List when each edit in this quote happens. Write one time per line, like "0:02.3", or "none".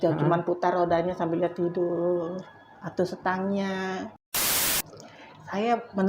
0:04.6